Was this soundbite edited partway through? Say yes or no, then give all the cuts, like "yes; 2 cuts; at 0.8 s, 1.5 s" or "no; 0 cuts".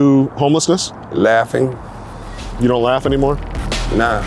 no; 0 cuts